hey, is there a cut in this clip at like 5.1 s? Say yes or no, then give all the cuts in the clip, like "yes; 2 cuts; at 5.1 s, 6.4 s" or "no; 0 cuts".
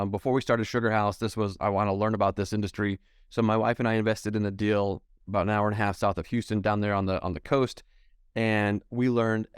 no; 1 cut; at 1.5 s